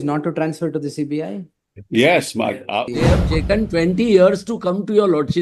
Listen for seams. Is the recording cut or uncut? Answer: cut